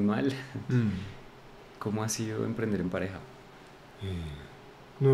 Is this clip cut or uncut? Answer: cut